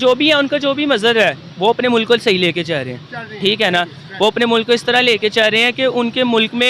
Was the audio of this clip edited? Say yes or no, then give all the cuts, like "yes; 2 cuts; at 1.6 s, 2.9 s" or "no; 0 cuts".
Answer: no; 0 cuts